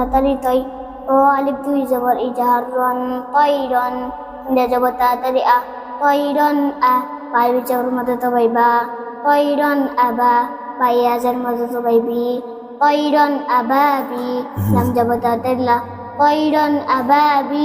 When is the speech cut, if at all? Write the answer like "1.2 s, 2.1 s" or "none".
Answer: none